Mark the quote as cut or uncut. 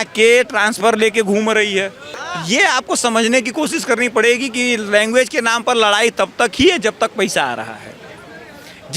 cut